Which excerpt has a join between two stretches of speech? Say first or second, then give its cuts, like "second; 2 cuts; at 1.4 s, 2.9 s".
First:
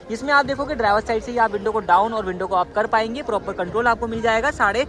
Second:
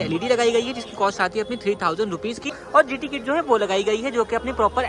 second; 1 cut; at 2.6 s